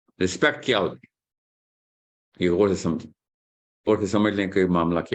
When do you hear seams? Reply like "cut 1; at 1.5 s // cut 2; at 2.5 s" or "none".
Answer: cut 1; at 3.9 s